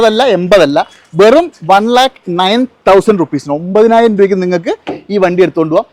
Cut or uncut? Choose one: uncut